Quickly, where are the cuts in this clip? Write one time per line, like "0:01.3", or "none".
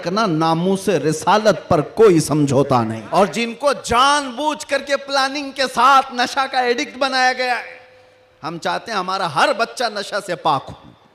0:03.0